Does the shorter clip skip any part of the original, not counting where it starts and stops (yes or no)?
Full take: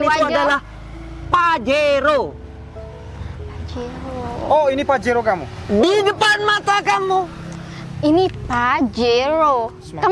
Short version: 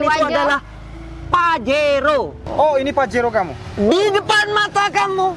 yes